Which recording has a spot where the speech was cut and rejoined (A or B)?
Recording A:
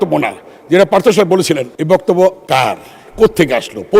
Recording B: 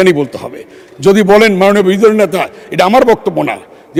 A